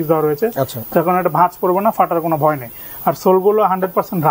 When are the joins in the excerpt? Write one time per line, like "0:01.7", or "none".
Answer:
none